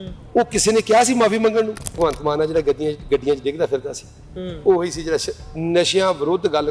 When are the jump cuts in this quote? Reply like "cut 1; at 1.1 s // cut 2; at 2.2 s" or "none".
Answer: cut 1; at 2.0 s